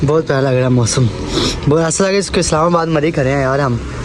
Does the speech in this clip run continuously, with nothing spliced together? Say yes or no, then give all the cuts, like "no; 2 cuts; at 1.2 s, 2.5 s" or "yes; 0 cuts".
yes; 0 cuts